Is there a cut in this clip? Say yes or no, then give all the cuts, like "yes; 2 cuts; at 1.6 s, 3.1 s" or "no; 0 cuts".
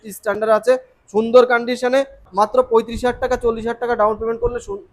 yes; 1 cut; at 2.2 s